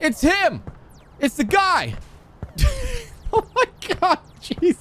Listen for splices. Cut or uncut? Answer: uncut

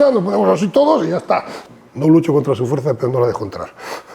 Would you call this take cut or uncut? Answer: cut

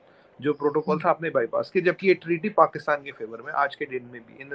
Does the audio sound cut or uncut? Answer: uncut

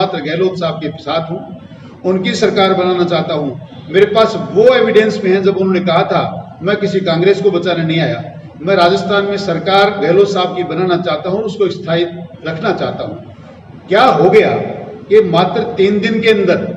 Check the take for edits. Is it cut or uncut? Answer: uncut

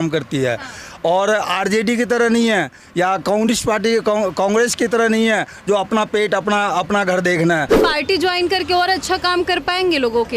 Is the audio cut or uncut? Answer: cut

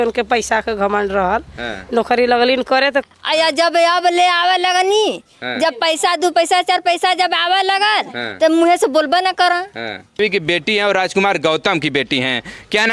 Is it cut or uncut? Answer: cut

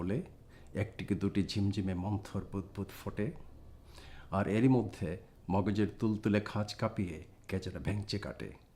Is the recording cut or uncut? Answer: cut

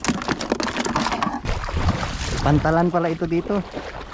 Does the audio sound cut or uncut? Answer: cut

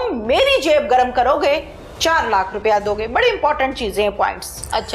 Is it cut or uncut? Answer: uncut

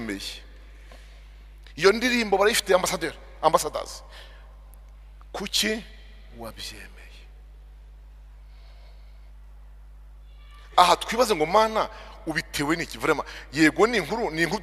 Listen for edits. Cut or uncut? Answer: uncut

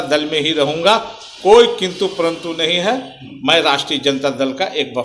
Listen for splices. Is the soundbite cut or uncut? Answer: uncut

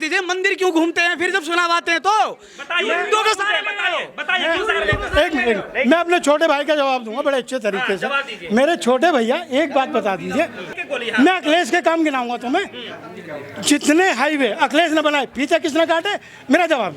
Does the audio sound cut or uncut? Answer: uncut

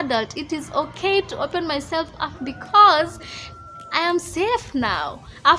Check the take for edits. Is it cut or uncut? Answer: uncut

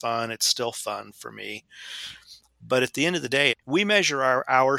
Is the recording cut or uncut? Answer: uncut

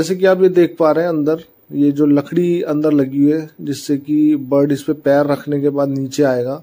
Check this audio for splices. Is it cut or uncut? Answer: uncut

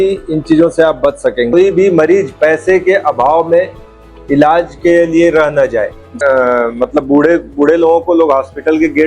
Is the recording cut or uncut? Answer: cut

